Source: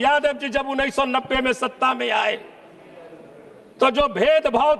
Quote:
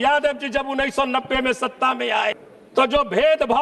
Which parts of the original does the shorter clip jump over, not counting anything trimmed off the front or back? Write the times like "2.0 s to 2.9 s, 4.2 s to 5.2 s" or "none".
2.5 s to 3.6 s